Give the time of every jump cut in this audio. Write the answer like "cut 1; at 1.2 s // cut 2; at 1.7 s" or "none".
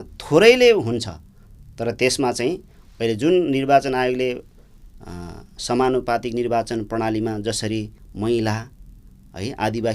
cut 1; at 8.0 s